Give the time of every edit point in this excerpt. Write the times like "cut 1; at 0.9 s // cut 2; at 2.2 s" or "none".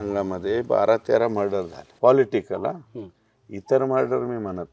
cut 1; at 1.8 s